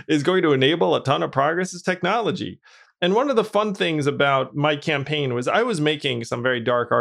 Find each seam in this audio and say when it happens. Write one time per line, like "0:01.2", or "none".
0:04.5